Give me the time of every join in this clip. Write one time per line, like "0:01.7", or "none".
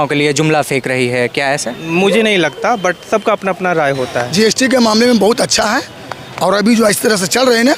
0:01.7
0:04.2